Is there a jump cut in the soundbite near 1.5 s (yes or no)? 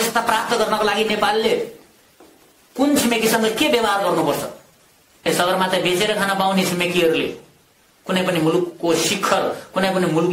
no